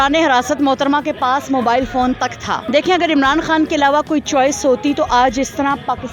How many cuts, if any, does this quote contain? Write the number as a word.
one